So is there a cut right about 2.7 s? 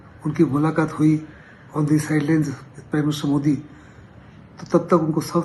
no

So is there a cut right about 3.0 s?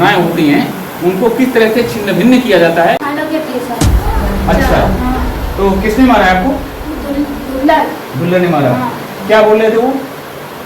yes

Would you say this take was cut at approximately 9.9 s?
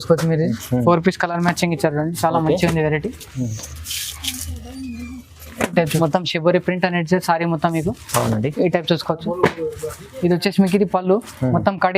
no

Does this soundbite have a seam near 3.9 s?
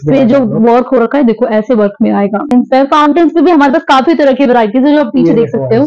no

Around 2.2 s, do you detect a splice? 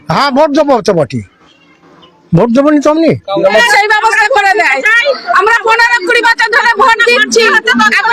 no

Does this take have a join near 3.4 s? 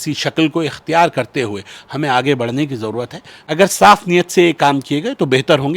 yes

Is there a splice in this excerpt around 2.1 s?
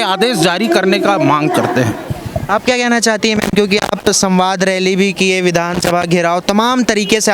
no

